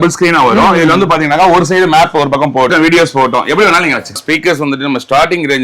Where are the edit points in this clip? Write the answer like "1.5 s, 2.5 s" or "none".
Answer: 2.7 s, 4.2 s